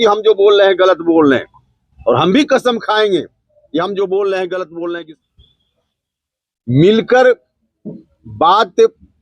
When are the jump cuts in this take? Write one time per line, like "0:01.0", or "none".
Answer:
0:05.1